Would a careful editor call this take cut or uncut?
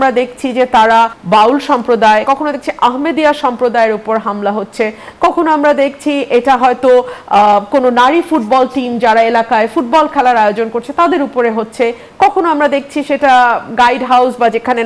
cut